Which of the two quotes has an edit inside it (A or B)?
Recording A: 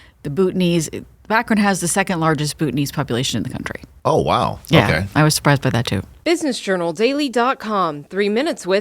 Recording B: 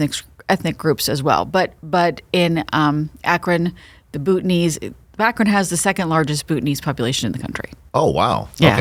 A